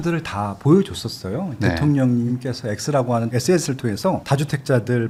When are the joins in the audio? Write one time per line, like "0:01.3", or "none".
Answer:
none